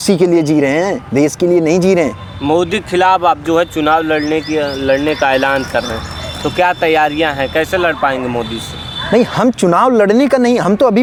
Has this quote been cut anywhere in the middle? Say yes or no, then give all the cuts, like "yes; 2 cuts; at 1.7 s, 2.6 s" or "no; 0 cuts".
no; 0 cuts